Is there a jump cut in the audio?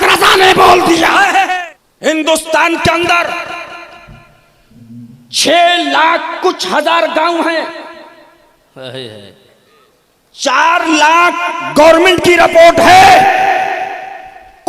yes; 1 cut; at 1.5 s

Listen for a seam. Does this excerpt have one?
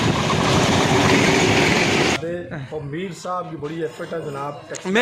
yes; 1 cut; at 2.2 s

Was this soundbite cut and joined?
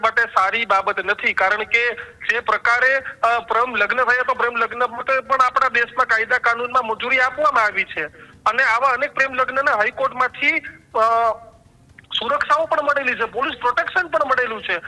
no; 0 cuts

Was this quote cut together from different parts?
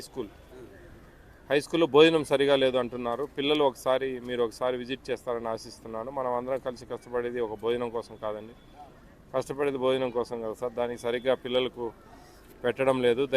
no; 0 cuts

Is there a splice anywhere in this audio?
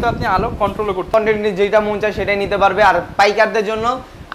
yes; 1 cut; at 1.1 s

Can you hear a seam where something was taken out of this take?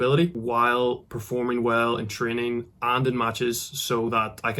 no; 0 cuts

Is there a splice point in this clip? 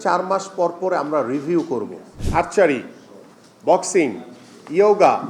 yes; 1 cut; at 2.1 s

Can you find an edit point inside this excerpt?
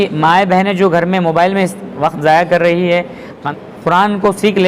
yes; 1 cut; at 3.4 s

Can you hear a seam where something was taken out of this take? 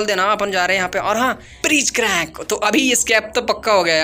yes; 1 cut; at 1.3 s

